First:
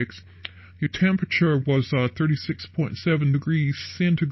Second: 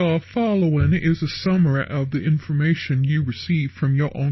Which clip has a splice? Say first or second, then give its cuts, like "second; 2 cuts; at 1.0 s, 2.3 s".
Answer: first; 1 cut; at 1.9 s